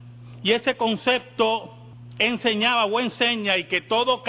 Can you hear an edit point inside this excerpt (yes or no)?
yes